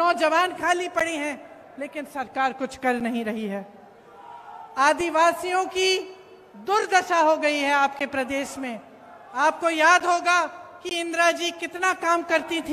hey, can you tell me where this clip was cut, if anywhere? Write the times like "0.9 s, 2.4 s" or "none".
none